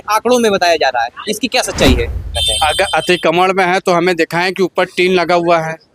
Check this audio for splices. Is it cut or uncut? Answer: cut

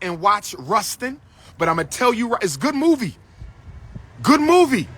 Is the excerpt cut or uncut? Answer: uncut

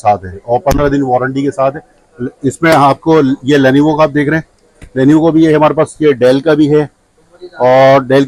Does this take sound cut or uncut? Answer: uncut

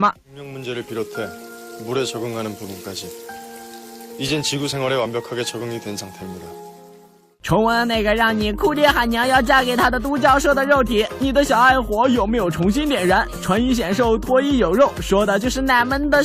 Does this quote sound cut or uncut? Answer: cut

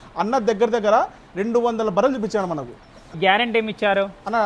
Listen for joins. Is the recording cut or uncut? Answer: cut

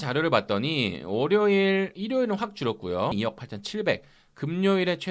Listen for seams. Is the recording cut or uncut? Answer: cut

